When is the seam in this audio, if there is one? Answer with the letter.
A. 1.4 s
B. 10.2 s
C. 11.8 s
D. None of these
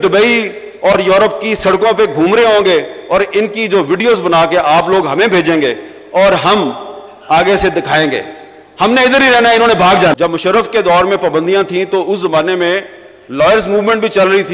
B